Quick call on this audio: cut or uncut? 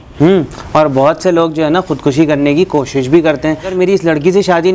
cut